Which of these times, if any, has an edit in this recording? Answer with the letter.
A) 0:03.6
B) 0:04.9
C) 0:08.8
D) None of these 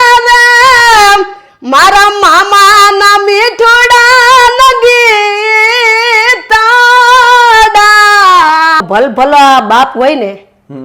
C